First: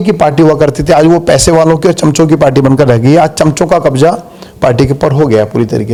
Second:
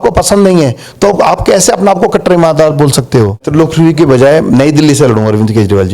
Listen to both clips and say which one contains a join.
second; 1 cut; at 3.4 s

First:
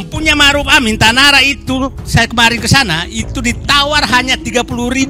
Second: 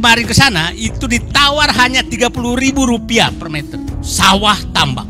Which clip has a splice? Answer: second; 1 cut; at 3.8 s

